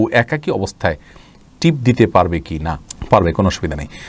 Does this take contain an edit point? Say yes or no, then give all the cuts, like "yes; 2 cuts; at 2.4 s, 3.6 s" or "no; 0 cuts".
no; 0 cuts